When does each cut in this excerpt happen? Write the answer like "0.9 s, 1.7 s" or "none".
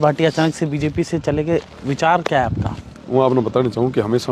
none